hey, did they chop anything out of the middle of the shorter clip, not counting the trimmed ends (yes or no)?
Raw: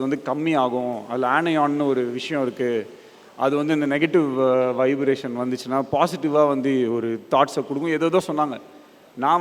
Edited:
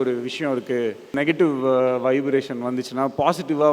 yes